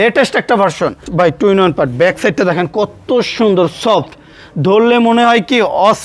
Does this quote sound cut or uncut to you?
cut